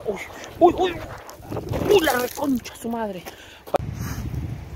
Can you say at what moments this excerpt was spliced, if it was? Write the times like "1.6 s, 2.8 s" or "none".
3.8 s